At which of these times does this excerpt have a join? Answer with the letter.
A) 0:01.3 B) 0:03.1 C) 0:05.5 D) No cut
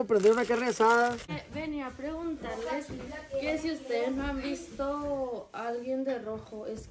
A